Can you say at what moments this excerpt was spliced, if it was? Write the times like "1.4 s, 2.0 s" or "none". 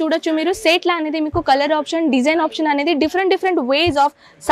none